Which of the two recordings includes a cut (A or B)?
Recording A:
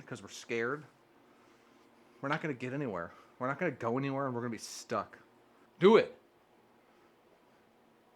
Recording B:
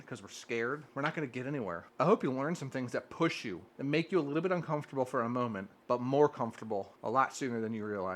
B